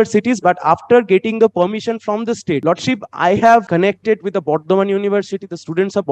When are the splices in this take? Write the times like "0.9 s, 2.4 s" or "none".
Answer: 2.6 s, 3.7 s